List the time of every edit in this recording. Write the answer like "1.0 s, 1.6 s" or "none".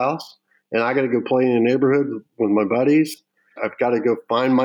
3.6 s